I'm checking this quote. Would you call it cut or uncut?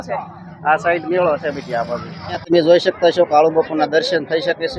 cut